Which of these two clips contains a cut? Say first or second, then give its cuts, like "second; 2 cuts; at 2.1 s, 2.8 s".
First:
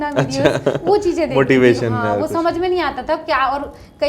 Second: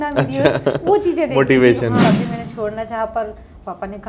second; 1 cut; at 2.0 s